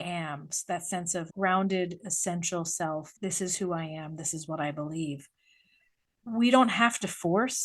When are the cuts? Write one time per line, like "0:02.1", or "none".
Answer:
0:03.1
0:06.1